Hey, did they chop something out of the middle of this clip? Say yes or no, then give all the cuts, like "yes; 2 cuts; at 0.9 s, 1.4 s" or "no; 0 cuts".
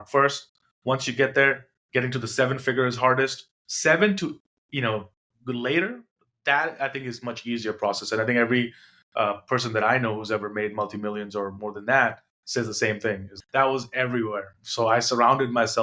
yes; 1 cut; at 13.3 s